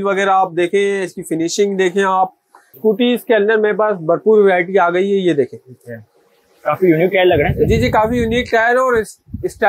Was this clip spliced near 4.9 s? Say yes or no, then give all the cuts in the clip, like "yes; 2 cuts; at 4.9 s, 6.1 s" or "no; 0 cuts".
no; 1 cut; at 2.8 s